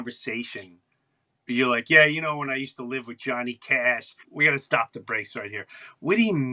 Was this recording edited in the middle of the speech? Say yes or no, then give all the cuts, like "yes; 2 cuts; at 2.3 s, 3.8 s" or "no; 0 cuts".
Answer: yes; 1 cut; at 4.2 s